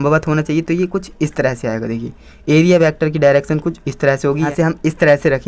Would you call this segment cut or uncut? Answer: cut